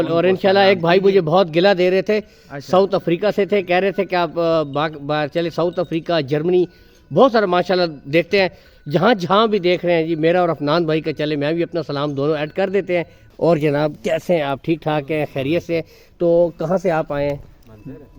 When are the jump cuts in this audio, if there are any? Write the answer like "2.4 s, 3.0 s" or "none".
13.2 s